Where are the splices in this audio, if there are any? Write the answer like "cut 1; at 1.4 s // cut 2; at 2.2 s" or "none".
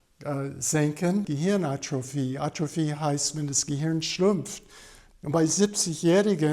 cut 1; at 1.3 s